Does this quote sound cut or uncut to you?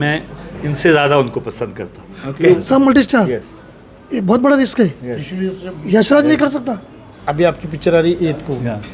cut